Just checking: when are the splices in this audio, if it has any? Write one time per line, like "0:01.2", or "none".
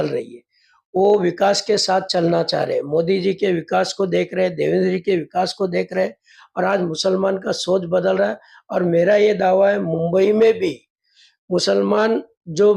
none